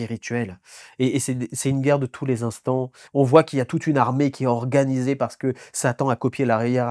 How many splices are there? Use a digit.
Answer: 1